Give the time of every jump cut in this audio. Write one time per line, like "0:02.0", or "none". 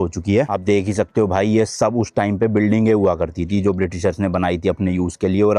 none